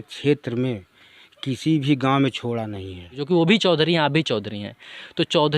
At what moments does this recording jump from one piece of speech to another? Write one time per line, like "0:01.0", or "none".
0:03.1